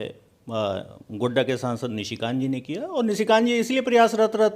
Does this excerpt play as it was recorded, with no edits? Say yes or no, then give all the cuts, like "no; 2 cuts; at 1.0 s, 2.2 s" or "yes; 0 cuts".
yes; 0 cuts